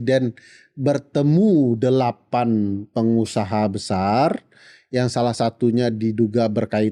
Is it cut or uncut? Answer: uncut